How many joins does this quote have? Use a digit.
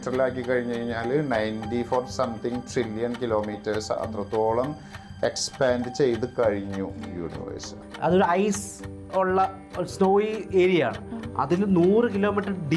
1